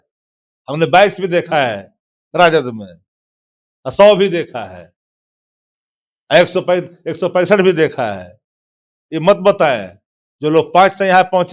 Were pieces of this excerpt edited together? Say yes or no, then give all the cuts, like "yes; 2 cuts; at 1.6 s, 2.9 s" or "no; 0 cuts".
no; 0 cuts